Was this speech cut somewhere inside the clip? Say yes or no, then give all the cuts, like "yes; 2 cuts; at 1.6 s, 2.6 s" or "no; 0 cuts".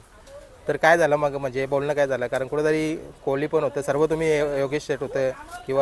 no; 0 cuts